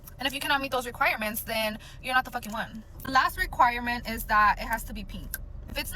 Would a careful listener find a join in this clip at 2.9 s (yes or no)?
yes